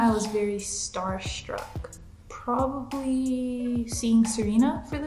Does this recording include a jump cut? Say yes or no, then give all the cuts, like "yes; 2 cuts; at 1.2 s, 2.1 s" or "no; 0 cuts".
no; 0 cuts